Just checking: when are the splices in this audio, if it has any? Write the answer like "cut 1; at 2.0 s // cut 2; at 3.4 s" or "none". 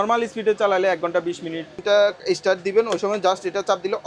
cut 1; at 1.8 s